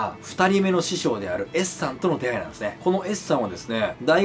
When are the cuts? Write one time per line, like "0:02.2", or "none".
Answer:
none